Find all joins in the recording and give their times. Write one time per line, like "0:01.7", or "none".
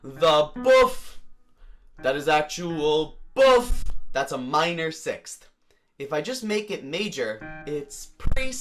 0:03.9
0:07.6